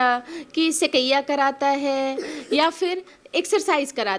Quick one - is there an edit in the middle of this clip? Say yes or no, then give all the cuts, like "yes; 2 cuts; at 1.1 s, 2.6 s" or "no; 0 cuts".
no; 0 cuts